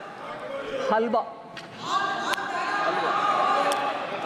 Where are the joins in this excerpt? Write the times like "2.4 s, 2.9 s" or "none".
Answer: none